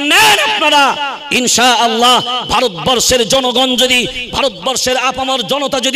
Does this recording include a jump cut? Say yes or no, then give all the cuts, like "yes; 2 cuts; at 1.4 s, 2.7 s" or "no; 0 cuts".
no; 0 cuts